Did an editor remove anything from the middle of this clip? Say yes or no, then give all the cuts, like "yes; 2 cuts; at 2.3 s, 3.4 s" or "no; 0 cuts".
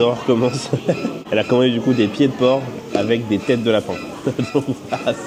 no; 0 cuts